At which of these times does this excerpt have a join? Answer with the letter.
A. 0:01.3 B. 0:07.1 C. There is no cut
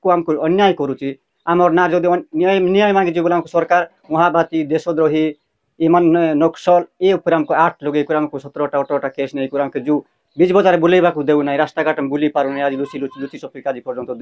C